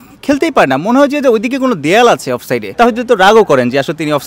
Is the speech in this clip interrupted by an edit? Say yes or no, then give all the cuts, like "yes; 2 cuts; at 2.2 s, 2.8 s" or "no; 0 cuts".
yes; 1 cut; at 2.7 s